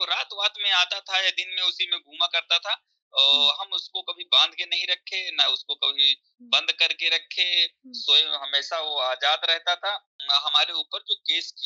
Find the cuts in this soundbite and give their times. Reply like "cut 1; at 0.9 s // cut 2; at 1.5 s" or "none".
cut 1; at 10.1 s